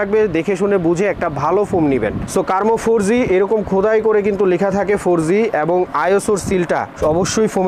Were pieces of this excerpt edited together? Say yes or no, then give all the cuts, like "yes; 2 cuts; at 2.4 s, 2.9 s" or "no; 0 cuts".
no; 0 cuts